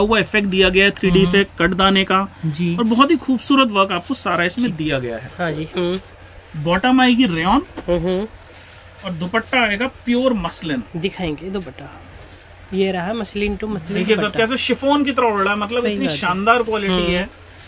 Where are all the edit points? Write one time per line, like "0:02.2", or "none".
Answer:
none